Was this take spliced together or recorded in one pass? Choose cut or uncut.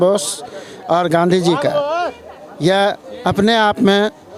uncut